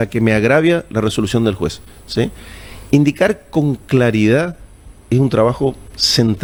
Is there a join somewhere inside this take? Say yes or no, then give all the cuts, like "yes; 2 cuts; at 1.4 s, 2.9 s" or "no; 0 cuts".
no; 0 cuts